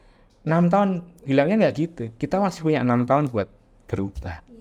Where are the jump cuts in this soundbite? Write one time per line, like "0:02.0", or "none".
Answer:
none